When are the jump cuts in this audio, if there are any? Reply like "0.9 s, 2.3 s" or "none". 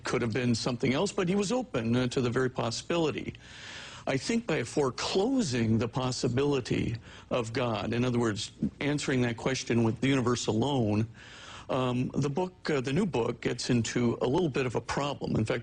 8.7 s